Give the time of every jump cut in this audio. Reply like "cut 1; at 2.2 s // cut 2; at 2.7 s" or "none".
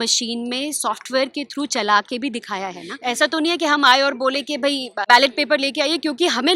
cut 1; at 2.9 s // cut 2; at 5.0 s